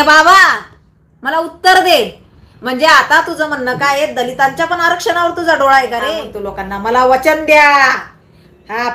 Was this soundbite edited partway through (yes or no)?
yes